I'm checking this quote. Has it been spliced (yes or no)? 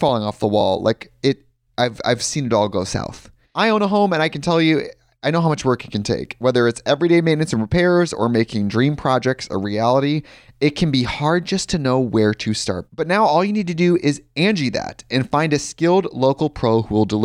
no